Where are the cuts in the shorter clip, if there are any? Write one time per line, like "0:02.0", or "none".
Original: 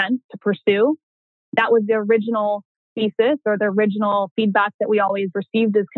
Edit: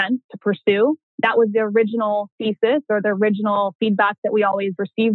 0:01.1
0:02.3